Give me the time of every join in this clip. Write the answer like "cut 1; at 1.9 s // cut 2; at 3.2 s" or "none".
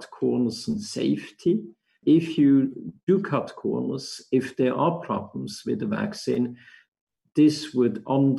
cut 1; at 2.0 s